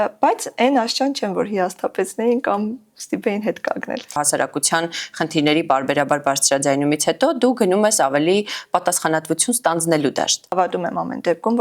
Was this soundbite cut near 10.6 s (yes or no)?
yes